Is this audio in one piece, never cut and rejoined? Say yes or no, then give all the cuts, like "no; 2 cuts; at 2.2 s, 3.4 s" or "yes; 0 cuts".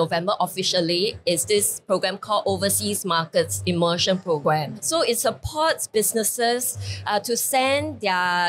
yes; 0 cuts